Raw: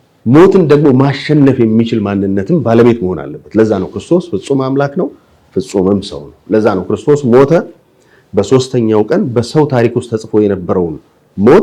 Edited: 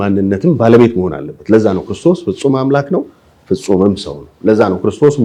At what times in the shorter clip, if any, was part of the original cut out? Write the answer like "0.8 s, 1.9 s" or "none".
none